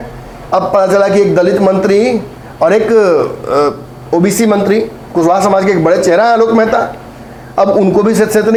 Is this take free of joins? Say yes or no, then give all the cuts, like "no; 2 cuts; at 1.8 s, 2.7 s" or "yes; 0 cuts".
yes; 0 cuts